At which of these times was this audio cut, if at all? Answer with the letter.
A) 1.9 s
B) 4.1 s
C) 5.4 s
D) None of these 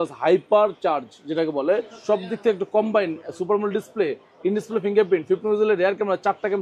A